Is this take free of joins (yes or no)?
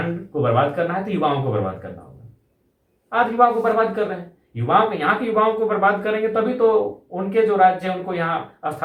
yes